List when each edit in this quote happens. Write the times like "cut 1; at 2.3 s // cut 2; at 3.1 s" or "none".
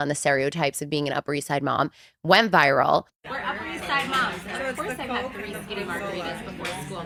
none